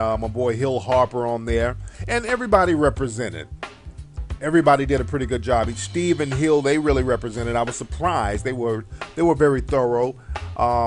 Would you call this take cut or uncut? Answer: cut